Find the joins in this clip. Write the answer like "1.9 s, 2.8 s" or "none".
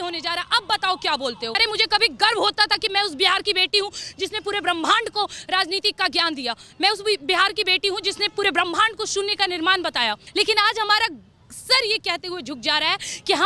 1.6 s, 10.2 s